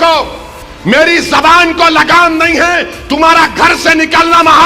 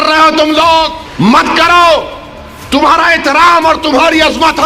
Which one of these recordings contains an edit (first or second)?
second